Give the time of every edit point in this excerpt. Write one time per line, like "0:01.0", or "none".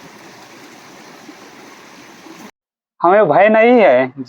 0:02.7